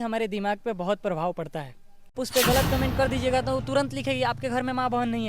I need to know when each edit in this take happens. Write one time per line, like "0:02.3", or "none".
0:02.2